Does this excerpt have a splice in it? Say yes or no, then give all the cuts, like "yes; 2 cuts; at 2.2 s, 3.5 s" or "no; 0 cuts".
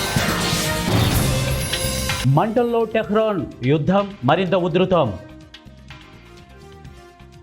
yes; 1 cut; at 2.2 s